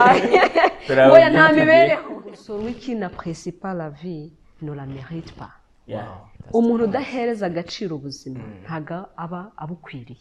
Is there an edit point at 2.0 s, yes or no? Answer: yes